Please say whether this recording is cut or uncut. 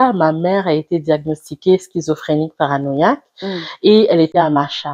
uncut